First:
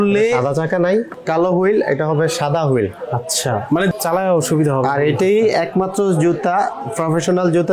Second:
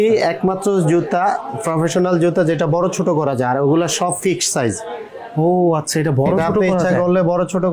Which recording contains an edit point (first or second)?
first